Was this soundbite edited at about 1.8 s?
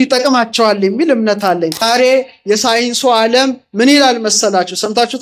yes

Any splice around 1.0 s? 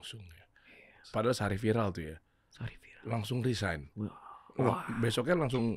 yes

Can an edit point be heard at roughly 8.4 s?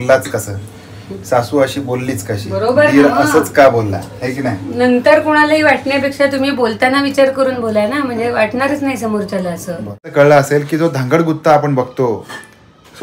no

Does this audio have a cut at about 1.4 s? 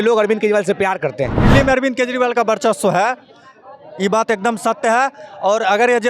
yes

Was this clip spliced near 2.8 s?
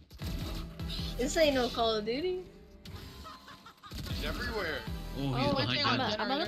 no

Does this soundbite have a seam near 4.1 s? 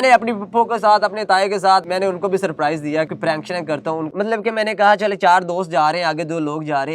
yes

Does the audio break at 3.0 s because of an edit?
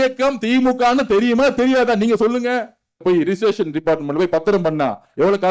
yes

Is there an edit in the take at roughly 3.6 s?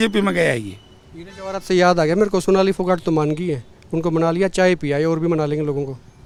no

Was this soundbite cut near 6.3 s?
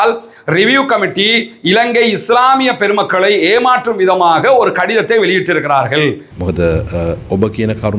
yes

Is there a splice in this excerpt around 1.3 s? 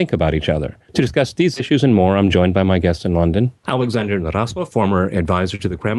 no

